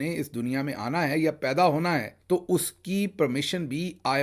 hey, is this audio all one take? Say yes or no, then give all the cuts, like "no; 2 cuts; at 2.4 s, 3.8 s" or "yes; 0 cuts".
yes; 0 cuts